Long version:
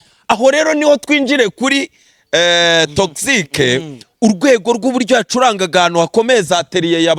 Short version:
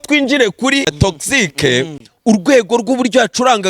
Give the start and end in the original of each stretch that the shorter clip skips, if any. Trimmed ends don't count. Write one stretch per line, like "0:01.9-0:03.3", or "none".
0:01.9-0:02.9